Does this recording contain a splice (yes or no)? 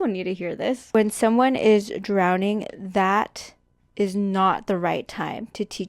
yes